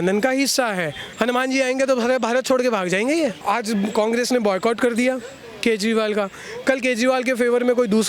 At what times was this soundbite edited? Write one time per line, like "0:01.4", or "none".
0:01.0
0:03.4